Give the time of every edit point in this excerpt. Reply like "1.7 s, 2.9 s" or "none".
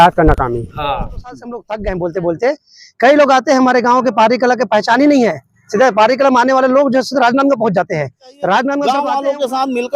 1.7 s, 8.8 s

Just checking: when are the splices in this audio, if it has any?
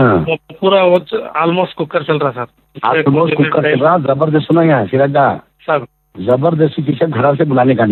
none

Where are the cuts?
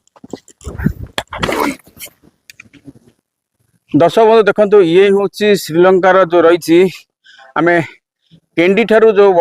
3.3 s

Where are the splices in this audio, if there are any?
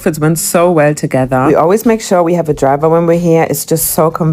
none

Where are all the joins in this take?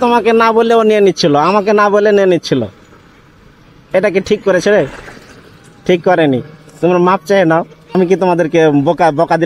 7.8 s

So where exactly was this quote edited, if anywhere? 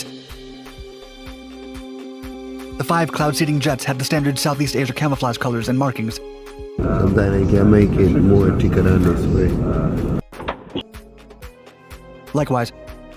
6.8 s

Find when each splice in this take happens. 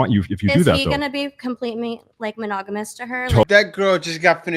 3.4 s

